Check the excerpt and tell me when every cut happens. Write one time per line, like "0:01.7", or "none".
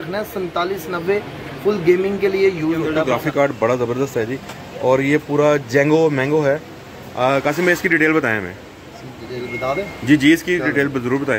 0:03.1